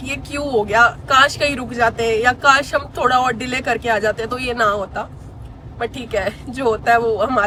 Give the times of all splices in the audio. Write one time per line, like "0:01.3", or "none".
none

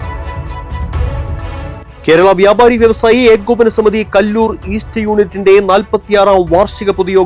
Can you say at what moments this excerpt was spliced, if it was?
0:01.9

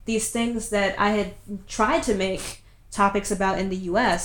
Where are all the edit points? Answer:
none

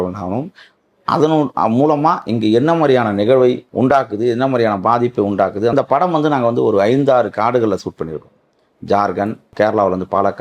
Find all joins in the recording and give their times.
0:03.7
0:05.7
0:09.5

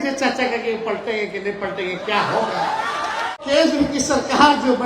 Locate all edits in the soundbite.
0:03.3

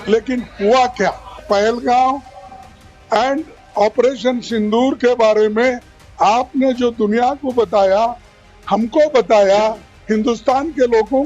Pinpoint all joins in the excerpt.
0:01.3

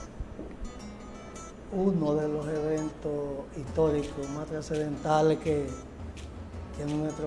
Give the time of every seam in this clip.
none

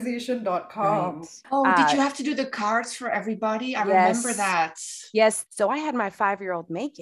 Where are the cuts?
0:01.3
0:05.4

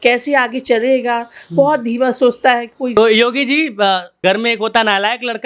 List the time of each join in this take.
0:03.0
0:04.2

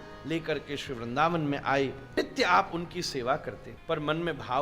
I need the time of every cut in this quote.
0:02.0
0:03.7

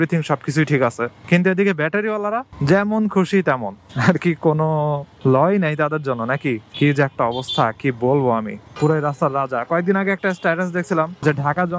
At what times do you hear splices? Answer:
0:08.6

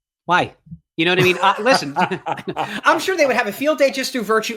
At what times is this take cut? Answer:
0:02.8

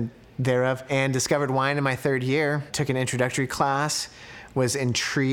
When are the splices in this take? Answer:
0:00.9
0:02.7

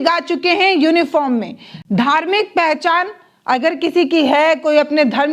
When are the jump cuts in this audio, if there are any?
none

